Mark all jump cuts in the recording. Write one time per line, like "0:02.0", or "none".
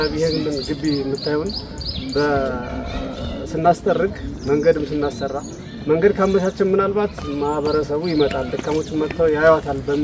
none